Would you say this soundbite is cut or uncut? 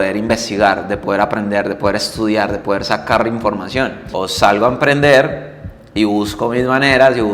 cut